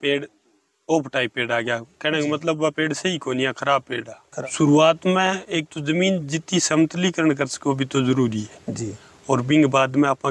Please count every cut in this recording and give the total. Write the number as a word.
one